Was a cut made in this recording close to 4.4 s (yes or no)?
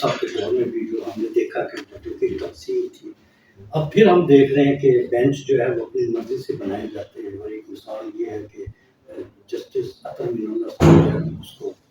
no